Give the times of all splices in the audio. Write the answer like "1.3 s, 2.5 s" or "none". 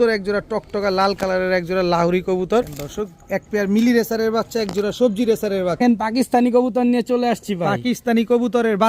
2.8 s, 5.8 s